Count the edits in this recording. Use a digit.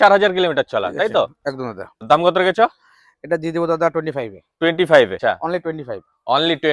2